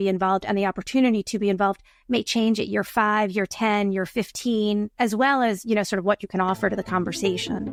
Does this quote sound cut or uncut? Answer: uncut